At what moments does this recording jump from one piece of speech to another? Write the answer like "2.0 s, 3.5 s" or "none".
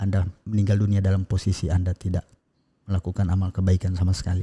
none